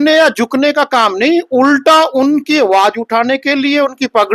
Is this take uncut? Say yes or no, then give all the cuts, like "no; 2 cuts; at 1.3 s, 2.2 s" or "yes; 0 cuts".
yes; 0 cuts